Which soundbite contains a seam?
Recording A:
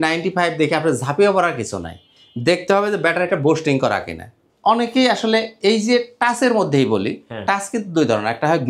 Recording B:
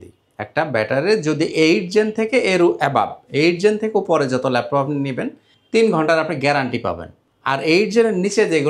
A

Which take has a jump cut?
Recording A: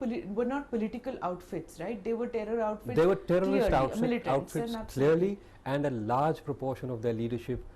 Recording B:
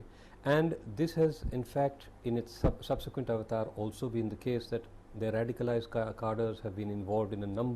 A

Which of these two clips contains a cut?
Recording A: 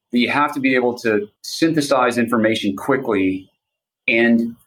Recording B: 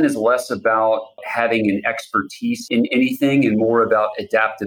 B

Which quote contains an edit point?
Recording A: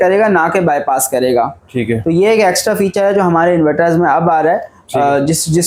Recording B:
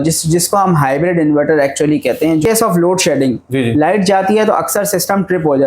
B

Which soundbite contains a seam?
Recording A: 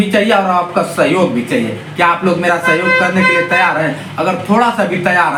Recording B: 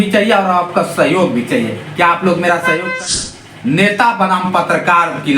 B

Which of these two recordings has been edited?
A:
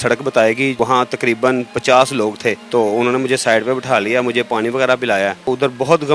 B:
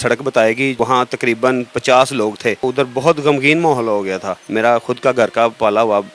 B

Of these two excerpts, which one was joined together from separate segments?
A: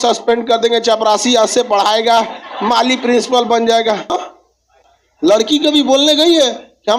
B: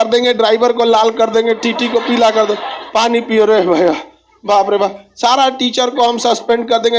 A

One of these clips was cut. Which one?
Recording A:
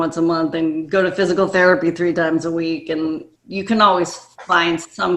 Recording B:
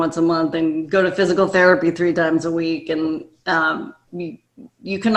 A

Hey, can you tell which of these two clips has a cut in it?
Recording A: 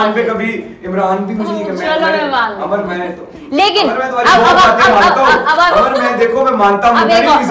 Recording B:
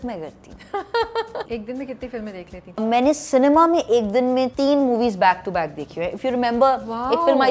B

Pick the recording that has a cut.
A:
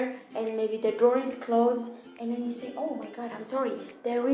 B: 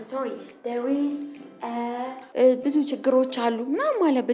B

